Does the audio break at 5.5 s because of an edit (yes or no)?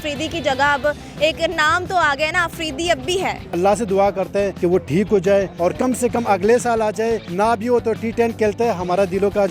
yes